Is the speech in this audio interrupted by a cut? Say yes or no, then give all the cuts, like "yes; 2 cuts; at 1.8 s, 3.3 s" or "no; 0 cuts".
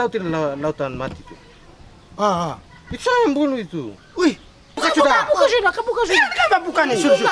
yes; 1 cut; at 4.8 s